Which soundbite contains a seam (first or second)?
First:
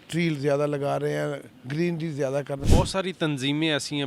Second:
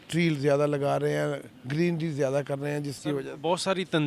first